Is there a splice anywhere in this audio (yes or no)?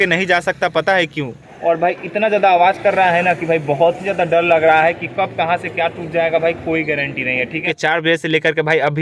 yes